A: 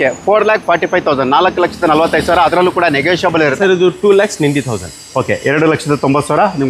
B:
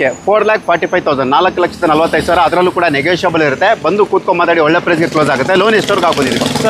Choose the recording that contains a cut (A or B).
A